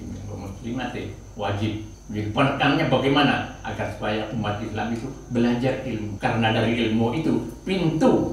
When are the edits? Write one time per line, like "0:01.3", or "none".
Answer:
0:01.9
0:06.1